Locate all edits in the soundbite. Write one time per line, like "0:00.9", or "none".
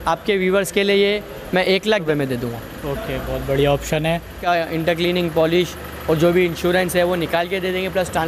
0:02.0
0:04.4